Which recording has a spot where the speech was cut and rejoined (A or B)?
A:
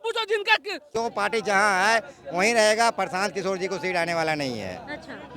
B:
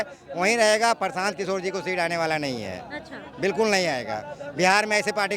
A